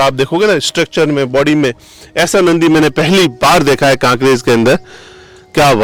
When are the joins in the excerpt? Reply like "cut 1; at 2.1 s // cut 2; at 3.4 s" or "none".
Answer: none